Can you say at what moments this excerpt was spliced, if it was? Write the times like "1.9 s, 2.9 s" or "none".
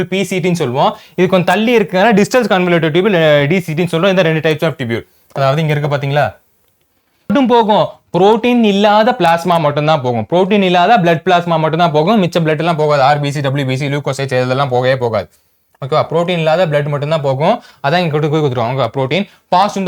7.3 s